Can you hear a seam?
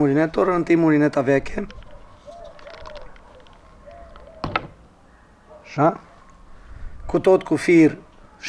no; 0 cuts

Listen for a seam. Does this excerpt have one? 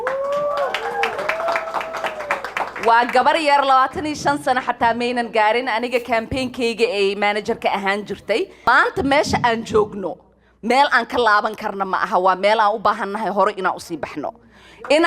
yes; 1 cut; at 8.6 s

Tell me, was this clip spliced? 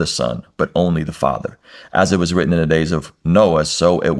no; 0 cuts

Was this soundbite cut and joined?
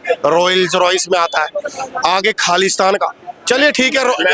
no; 0 cuts

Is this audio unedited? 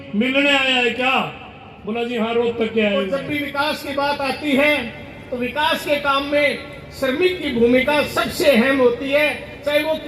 no; 1 cut; at 3.2 s

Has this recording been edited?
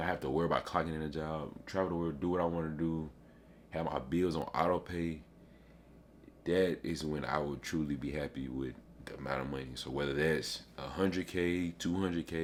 no; 0 cuts

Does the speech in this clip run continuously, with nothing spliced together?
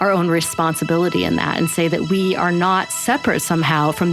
yes; 0 cuts

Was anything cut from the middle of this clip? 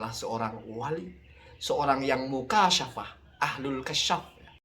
no; 0 cuts

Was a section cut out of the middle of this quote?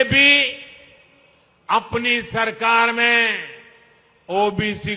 no; 0 cuts

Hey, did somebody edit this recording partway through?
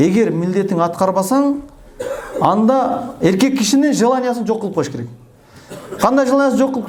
no; 0 cuts

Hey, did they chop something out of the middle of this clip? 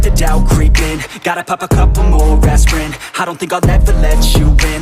no; 0 cuts

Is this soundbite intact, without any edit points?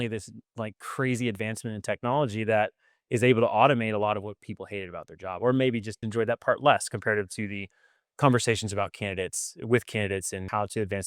no; 1 cut; at 6.0 s

